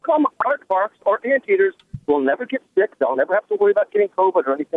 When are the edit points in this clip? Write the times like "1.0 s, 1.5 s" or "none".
none

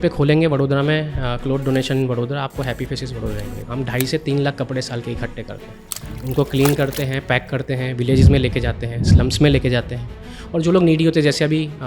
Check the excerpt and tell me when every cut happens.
6.0 s

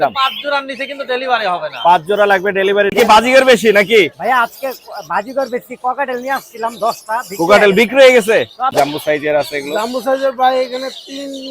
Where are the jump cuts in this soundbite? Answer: 2.9 s, 8.7 s

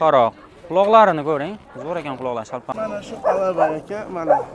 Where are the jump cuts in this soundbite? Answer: 2.7 s

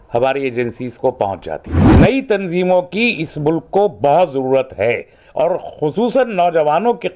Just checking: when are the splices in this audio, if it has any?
1.7 s

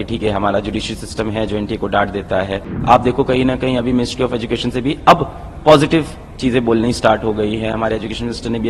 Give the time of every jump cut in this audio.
2.7 s

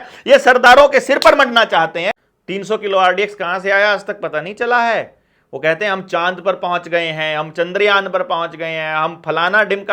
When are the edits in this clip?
2.1 s

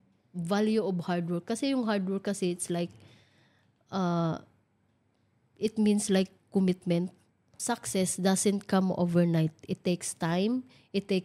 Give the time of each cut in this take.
7.5 s

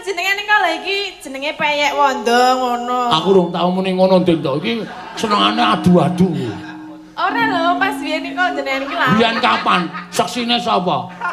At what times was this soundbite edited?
none

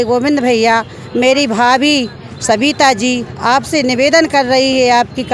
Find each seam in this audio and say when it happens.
none

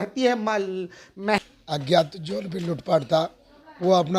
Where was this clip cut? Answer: 1.3 s

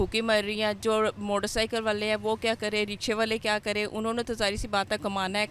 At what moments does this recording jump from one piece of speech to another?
none

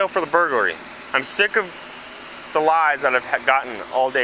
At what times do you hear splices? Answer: 1.0 s

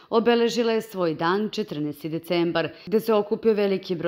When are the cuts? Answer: 2.8 s

